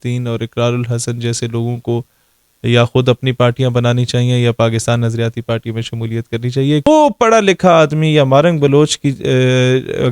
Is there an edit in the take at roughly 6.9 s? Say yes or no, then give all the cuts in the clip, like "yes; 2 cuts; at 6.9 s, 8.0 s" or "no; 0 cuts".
yes; 1 cut; at 6.9 s